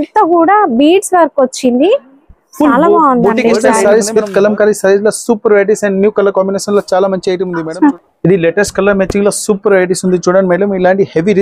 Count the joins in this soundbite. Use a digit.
2